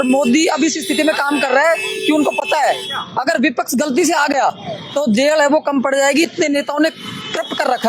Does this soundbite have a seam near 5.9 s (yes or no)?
no